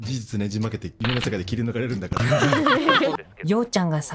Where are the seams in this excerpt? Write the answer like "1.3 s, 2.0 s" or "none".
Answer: 0.9 s, 3.1 s